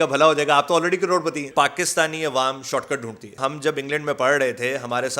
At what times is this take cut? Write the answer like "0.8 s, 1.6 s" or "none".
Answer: 1.5 s, 3.4 s